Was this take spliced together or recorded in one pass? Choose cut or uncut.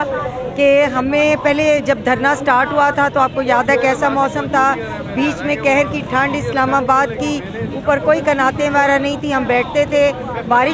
uncut